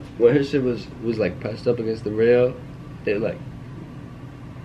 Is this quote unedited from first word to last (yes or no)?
yes